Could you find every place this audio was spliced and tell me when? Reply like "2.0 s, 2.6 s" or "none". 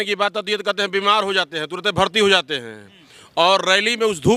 none